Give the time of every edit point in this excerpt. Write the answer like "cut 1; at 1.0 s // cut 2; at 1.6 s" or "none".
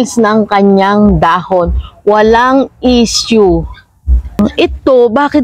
cut 1; at 4.4 s